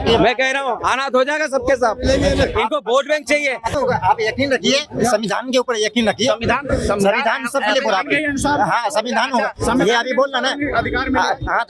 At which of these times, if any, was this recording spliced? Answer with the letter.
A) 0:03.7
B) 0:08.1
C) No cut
A